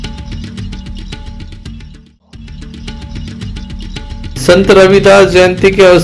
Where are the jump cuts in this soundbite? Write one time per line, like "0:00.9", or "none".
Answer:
0:02.6
0:04.3

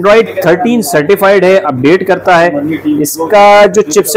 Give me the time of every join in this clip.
none

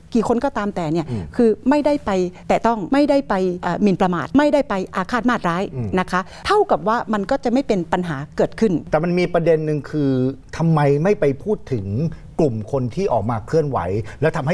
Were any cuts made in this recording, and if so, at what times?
0:02.7
0:03.9
0:06.3
0:08.8

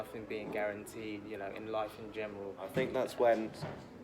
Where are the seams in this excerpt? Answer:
0:02.7

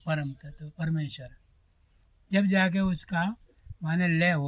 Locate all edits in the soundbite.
none

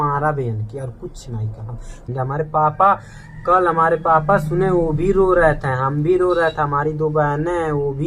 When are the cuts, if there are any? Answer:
0:02.1

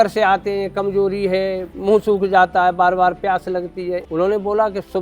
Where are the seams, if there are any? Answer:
0:01.7
0:04.0

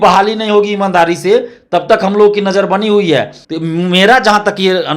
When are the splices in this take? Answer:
0:03.4

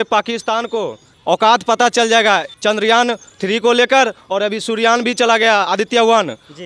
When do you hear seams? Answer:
0:01.0
0:02.5
0:03.3

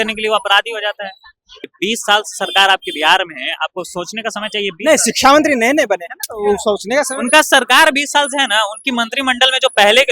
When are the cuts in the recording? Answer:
0:01.7

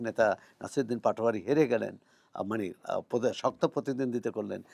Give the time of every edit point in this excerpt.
none

